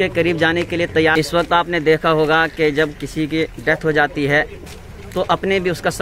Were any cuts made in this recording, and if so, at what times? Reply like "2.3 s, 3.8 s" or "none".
1.1 s